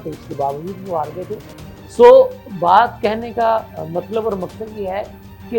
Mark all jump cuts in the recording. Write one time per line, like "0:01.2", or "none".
none